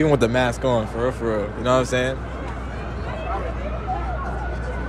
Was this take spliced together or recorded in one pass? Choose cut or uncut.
uncut